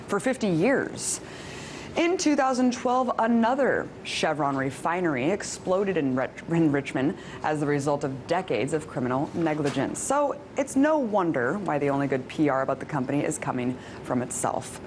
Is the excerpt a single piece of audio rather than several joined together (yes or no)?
yes